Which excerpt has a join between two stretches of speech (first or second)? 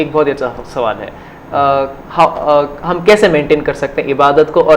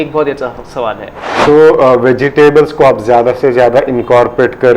second